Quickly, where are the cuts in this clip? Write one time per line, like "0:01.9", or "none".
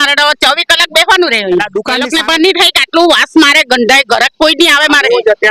0:02.0